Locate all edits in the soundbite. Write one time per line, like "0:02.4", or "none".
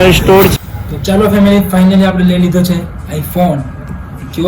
0:01.0